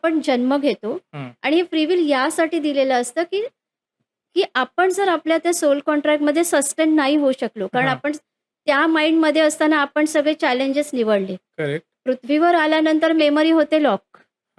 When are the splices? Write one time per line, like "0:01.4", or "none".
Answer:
none